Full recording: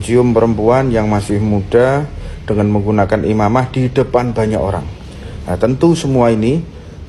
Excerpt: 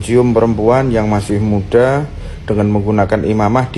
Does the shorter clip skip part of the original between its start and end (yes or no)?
no